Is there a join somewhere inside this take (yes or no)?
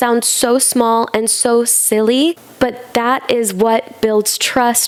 no